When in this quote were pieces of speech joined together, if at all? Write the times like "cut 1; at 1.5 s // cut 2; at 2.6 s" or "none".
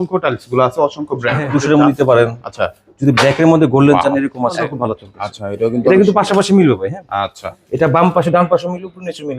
cut 1; at 1.3 s // cut 2; at 4.7 s